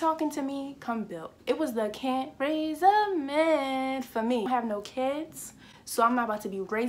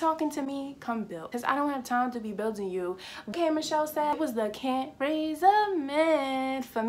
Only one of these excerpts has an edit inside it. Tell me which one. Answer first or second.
first